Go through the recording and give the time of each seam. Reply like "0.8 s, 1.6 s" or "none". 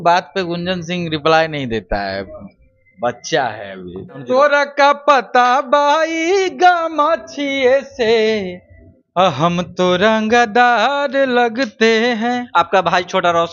4.2 s, 12.4 s